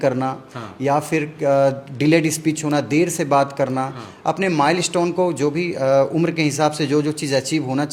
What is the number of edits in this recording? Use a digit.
0